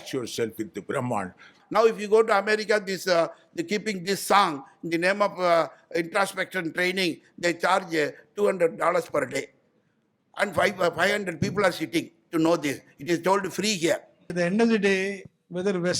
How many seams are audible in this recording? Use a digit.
2